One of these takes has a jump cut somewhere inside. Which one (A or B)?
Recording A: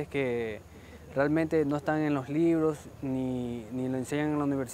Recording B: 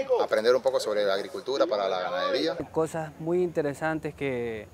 B